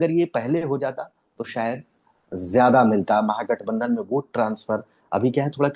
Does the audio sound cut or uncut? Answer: uncut